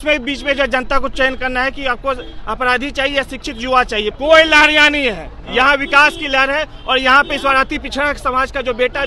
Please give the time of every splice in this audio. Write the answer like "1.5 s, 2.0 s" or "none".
4.1 s